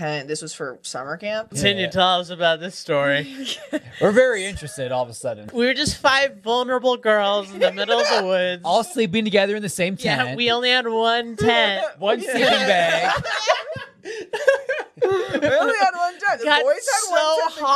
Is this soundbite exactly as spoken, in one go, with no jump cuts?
no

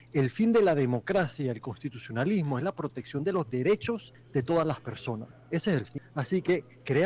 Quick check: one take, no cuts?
no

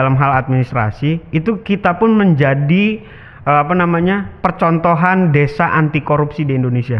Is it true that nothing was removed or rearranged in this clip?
yes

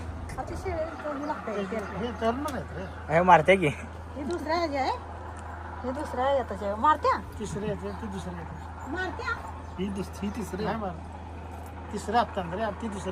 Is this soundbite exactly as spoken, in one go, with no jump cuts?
yes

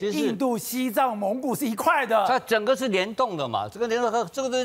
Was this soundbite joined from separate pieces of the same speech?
no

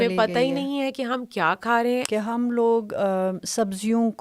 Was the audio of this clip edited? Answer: yes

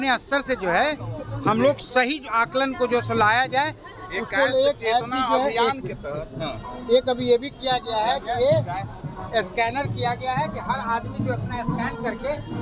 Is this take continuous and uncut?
yes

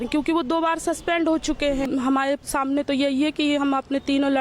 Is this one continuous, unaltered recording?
no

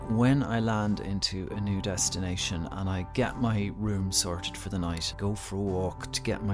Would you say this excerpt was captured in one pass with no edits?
no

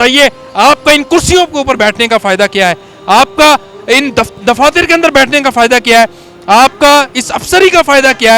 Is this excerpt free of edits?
yes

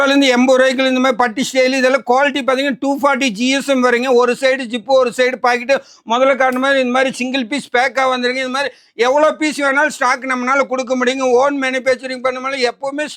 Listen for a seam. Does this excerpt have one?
no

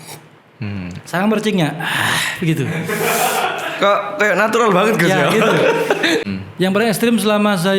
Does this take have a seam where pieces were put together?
yes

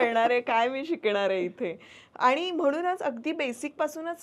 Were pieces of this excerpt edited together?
no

